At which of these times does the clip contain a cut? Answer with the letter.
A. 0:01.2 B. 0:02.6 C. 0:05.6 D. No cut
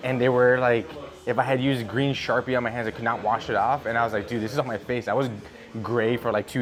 D